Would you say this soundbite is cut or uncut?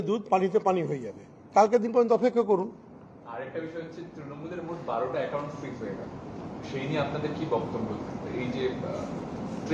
uncut